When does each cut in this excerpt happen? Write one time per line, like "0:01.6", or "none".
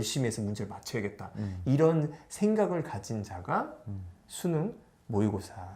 none